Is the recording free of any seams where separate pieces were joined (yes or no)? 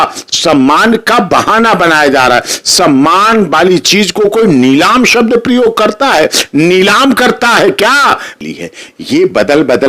no